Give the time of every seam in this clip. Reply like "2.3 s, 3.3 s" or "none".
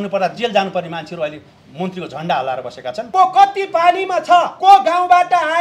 3.0 s, 4.5 s

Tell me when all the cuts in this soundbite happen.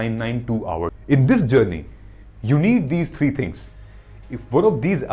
1.0 s

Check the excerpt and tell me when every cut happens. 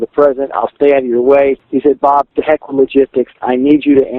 2.1 s

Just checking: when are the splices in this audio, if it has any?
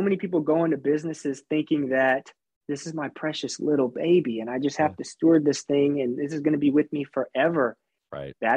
2.5 s

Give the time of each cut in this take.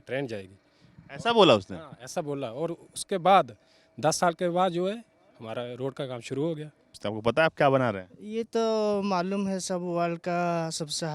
7.0 s

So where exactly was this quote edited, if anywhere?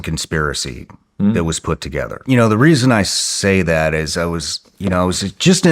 2.2 s

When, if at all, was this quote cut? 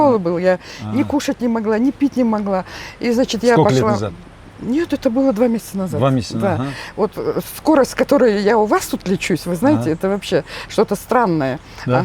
none

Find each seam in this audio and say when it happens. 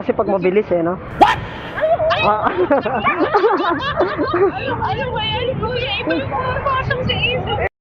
none

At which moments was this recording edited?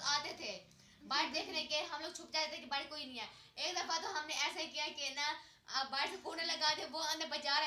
none

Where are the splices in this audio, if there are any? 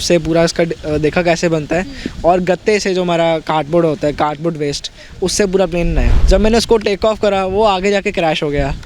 6.1 s

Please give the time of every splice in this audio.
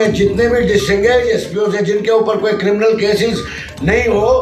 none

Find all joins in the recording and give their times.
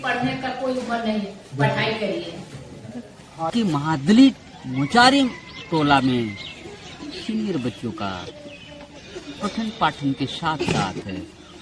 3.5 s

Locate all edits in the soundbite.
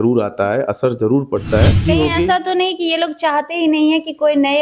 1.8 s

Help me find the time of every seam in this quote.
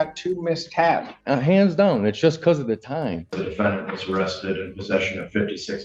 1.1 s, 3.4 s

